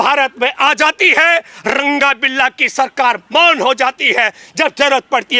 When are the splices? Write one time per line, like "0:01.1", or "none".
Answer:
none